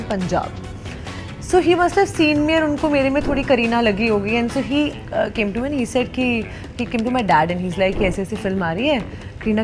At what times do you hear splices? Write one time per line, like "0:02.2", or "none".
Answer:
none